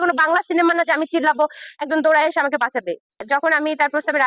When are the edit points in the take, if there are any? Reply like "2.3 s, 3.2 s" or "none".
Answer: 3.2 s